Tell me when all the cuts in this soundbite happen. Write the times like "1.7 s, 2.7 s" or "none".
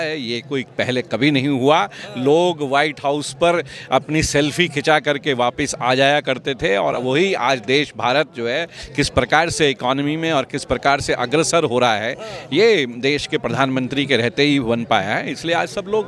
none